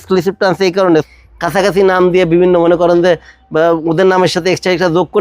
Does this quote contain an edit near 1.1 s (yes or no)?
yes